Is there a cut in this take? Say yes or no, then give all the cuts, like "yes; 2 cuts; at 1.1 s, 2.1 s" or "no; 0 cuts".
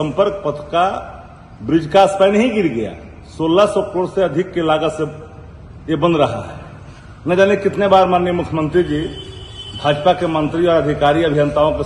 no; 0 cuts